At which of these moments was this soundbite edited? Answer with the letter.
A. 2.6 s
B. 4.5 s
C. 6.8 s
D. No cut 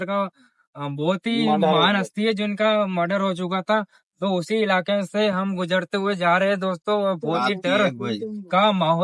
D